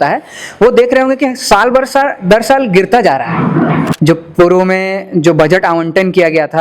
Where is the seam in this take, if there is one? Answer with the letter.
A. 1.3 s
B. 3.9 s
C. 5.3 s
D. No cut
B